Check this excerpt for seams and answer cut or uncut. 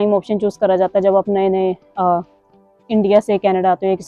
uncut